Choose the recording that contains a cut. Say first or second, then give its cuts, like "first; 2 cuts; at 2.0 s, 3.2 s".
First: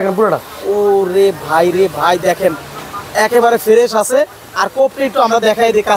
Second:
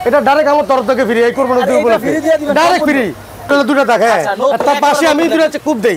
second; 1 cut; at 3.5 s